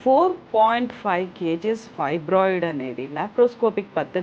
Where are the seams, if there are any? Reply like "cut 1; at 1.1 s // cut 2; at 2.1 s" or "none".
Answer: none